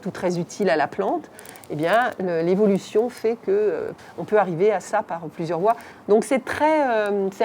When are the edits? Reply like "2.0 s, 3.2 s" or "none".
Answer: 3.9 s, 5.9 s